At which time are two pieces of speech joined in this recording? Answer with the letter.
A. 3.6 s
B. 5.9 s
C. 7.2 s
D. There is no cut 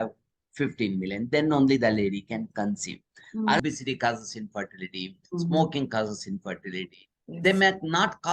A